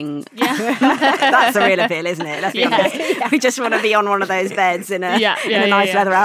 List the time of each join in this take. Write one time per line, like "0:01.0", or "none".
none